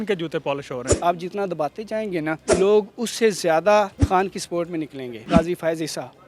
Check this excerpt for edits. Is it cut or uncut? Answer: cut